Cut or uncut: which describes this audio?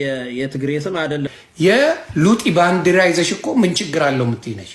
cut